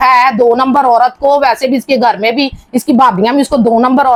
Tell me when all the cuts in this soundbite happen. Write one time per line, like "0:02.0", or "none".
none